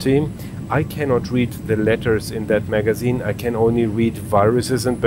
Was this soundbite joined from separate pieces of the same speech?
no; 0 cuts

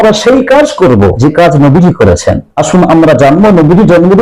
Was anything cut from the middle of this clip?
yes; 2 cuts; at 1.2 s, 2.5 s

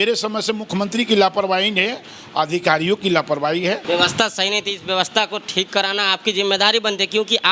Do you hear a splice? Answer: yes; 1 cut; at 3.8 s

